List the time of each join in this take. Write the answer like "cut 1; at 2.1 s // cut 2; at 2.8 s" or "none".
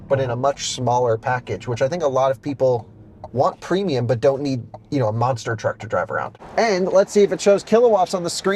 cut 1; at 6.4 s